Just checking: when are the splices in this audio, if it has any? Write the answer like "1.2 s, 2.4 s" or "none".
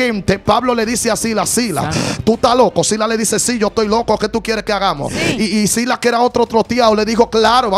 5.1 s